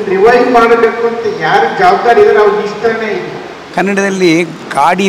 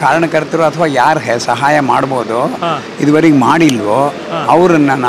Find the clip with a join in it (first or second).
first